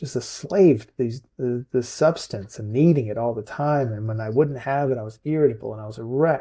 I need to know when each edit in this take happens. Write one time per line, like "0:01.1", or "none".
none